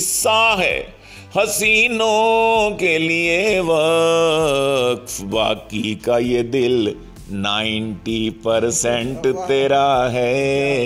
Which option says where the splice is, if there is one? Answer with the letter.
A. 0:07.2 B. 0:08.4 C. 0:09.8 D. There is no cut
D